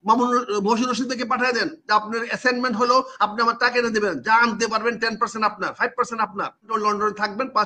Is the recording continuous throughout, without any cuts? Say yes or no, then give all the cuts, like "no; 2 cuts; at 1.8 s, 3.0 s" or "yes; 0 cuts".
no; 1 cut; at 6.7 s